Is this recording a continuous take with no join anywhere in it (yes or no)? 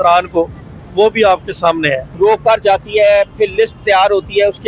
no